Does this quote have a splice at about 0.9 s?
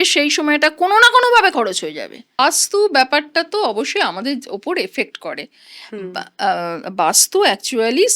no; 1 cut; at 2.4 s

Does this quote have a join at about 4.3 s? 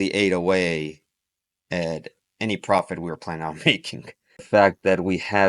yes; 1 cut; at 4.3 s

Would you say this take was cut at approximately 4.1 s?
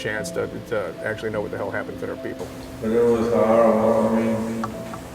no; 1 cut; at 2.6 s

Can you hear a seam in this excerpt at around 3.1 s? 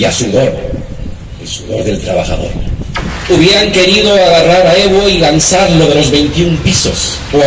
yes; 1 cut; at 3.1 s

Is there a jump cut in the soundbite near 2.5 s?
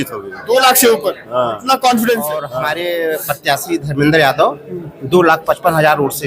yes; 1 cut; at 2.5 s

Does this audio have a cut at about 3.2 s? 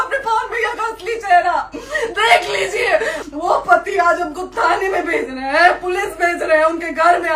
yes; 1 cut; at 3.2 s

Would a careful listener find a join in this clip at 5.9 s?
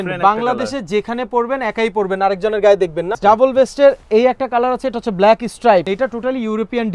yes; 2 cuts; at 3.1 s, 5.9 s

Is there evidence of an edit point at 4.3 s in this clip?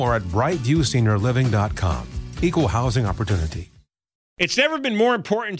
yes; 1 cut; at 4.3 s

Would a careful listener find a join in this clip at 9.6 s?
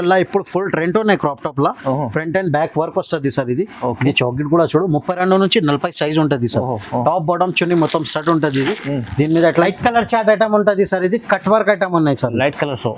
yes; 1 cut; at 9.6 s

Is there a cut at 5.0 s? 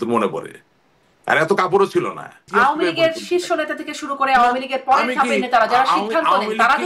no; 1 cut; at 2.4 s

